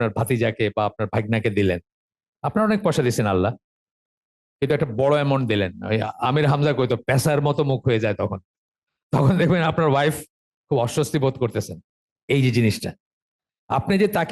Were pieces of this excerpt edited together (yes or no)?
no